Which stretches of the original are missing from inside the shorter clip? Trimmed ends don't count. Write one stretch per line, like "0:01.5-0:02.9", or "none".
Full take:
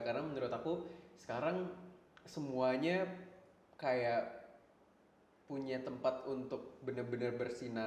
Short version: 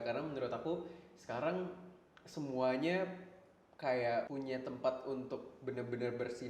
0:04.3-0:05.5